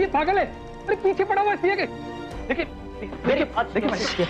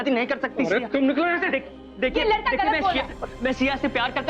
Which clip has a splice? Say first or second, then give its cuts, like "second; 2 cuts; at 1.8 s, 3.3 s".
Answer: second; 1 cut; at 1.8 s